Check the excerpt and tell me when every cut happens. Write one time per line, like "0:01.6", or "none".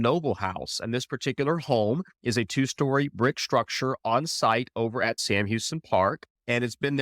0:05.2